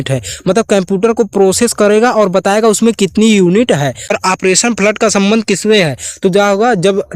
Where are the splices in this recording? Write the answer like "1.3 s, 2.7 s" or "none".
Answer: 4.1 s